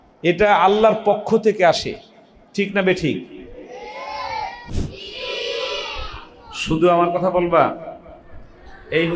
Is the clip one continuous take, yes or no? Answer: no